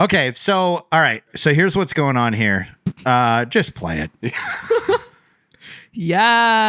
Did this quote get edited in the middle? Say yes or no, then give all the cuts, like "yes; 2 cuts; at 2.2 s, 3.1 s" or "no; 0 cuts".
yes; 1 cut; at 1.4 s